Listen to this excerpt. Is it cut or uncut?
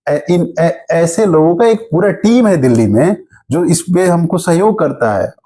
uncut